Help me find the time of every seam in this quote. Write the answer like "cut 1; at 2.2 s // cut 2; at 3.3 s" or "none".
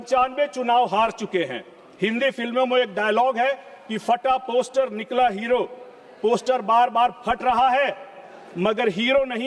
none